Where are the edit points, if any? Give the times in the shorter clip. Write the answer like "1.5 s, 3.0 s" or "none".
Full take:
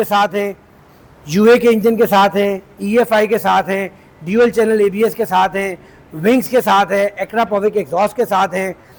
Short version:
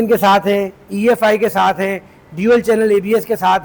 none